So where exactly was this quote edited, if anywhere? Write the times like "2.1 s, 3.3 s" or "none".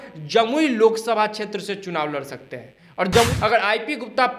3.3 s